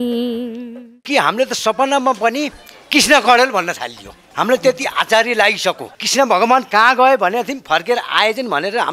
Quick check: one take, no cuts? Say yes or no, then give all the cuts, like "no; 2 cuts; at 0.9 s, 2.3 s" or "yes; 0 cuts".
no; 2 cuts; at 1.0 s, 5.9 s